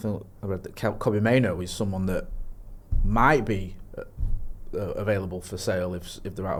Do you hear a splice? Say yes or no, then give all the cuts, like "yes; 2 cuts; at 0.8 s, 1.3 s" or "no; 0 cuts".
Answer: no; 0 cuts